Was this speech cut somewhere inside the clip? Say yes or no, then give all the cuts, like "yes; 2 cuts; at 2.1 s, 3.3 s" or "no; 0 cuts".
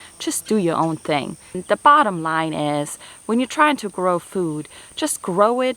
yes; 1 cut; at 1.6 s